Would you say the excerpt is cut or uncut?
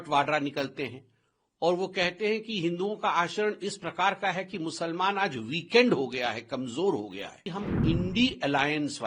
cut